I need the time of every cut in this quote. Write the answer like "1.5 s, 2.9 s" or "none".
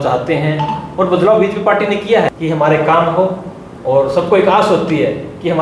2.4 s